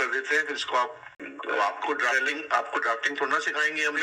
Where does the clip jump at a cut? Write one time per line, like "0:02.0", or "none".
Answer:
0:01.3